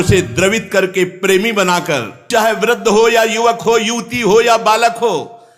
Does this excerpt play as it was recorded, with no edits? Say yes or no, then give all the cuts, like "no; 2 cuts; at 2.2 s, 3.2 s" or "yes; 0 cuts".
no; 1 cut; at 2.3 s